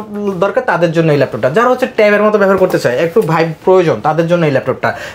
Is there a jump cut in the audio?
no; 0 cuts

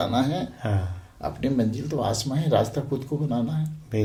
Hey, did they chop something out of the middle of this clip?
no; 0 cuts

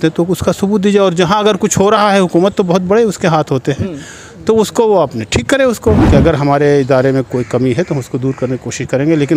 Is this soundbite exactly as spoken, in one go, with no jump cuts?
no; 1 cut; at 6.0 s

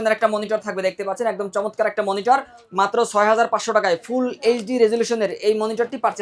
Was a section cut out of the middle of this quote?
no; 0 cuts

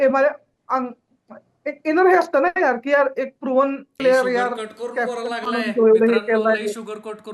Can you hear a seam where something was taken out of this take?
yes; 1 cut; at 3.9 s

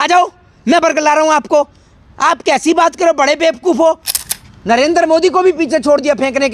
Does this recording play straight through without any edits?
no; 1 cut; at 4.1 s

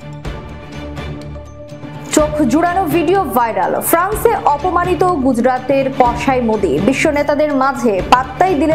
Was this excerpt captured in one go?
no; 1 cut; at 1.0 s

